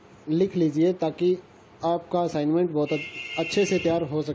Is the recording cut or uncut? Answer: cut